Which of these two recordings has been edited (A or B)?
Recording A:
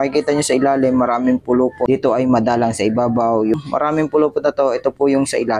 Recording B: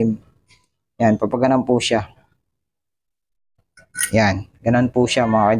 A